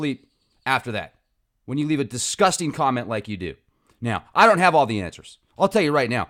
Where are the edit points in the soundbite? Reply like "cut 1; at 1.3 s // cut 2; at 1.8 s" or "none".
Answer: cut 1; at 5.0 s